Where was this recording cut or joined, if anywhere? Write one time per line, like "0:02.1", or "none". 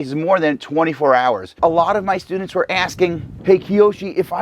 0:01.6
0:03.3